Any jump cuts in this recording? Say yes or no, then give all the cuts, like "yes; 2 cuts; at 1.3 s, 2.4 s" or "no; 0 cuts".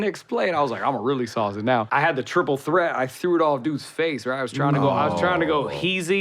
yes; 1 cut; at 1.9 s